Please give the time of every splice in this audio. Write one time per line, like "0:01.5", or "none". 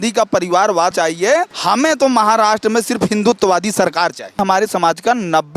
0:01.0
0:04.4